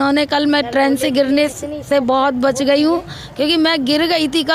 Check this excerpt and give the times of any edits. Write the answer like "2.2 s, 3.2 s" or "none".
none